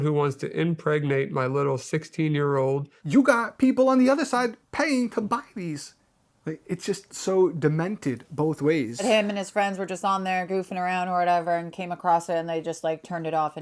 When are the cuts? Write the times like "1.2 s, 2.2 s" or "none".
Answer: 2.9 s, 9.0 s